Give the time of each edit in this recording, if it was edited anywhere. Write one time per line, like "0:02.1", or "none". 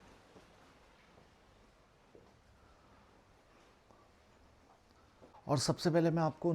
0:05.3